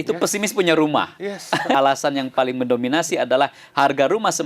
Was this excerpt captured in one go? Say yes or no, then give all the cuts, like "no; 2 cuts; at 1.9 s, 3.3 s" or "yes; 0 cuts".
no; 1 cut; at 1.7 s